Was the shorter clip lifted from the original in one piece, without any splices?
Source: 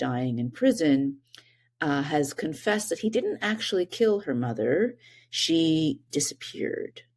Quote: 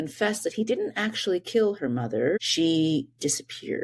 no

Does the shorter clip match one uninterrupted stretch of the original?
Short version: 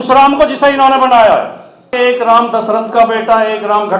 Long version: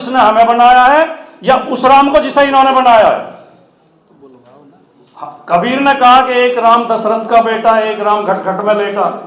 no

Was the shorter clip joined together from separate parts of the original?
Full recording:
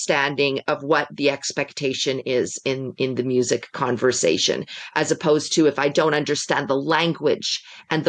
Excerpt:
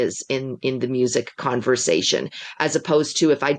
no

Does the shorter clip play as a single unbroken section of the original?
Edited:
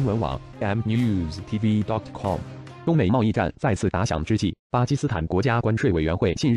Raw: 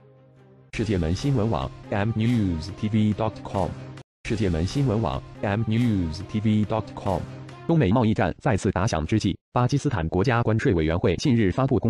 no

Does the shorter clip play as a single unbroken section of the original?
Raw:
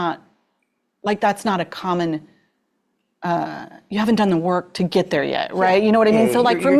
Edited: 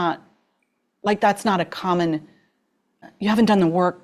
no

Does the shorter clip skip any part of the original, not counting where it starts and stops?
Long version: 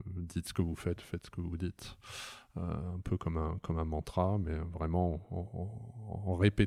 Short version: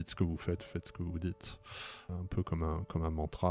yes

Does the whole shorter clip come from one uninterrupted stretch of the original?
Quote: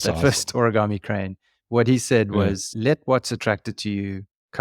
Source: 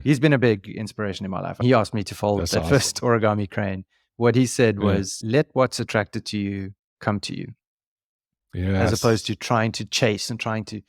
yes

